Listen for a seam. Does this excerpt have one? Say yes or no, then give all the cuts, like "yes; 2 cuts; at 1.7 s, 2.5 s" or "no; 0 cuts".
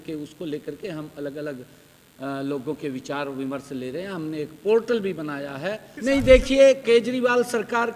yes; 1 cut; at 5.9 s